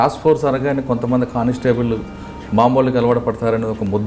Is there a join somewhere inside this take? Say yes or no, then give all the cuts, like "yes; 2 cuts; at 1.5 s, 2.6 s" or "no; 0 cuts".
no; 0 cuts